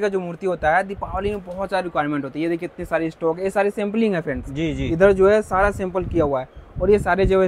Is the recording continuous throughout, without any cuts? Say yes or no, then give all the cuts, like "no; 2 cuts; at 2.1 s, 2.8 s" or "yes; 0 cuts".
yes; 0 cuts